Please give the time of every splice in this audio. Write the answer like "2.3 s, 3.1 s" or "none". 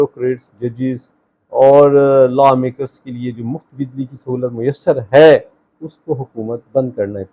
none